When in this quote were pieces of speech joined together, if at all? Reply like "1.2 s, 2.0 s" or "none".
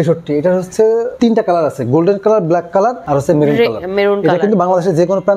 1.1 s, 3.0 s